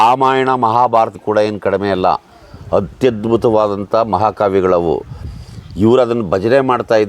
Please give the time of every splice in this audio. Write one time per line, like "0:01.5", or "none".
0:01.2